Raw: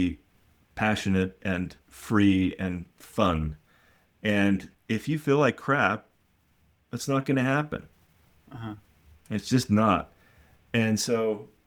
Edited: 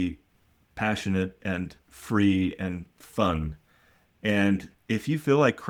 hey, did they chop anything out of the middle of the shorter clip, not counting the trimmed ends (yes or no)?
no